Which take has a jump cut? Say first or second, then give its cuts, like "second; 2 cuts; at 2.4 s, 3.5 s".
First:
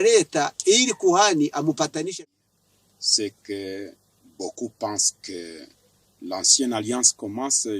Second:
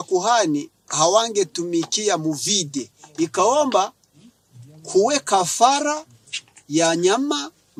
first; 1 cut; at 2.2 s